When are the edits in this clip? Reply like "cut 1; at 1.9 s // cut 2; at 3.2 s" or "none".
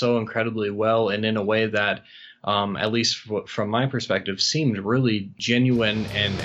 cut 1; at 5.4 s